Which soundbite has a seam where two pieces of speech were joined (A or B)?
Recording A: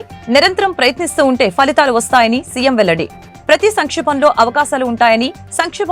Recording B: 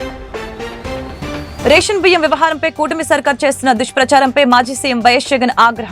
B